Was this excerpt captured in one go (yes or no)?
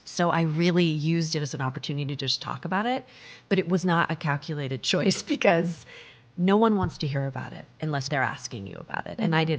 no